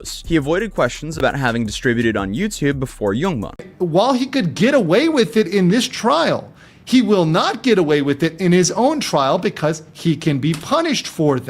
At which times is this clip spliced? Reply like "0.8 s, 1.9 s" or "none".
3.6 s